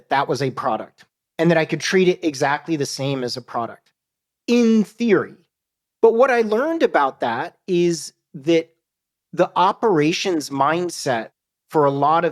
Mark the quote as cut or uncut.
uncut